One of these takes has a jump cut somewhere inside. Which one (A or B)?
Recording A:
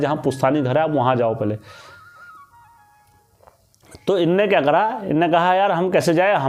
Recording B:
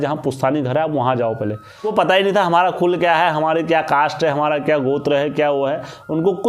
B